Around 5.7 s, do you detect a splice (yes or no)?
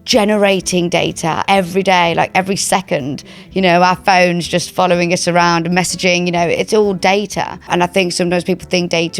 no